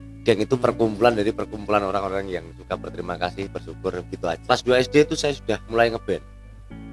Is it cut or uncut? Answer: cut